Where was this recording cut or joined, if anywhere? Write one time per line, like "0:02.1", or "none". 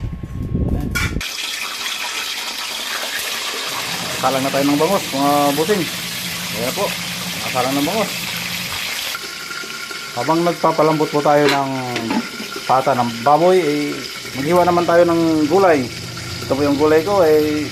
none